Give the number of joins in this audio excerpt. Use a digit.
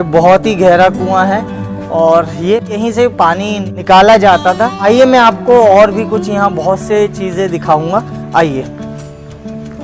0